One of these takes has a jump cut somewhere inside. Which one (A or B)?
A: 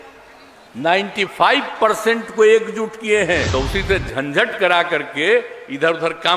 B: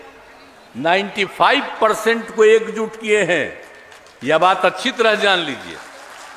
A